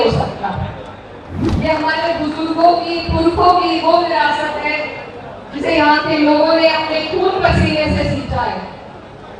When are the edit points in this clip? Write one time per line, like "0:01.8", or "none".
0:01.4